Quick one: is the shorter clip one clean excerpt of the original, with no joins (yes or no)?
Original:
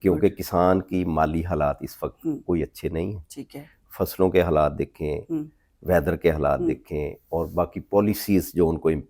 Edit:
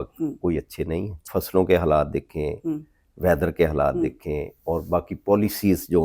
no